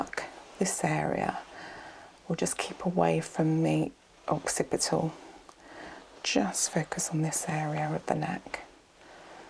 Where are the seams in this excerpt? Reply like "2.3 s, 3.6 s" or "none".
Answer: none